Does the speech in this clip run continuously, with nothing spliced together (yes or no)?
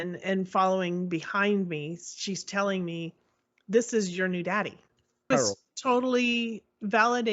no